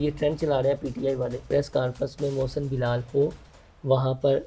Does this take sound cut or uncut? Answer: cut